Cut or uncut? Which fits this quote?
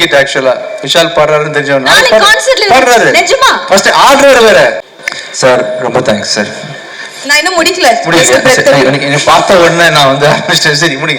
cut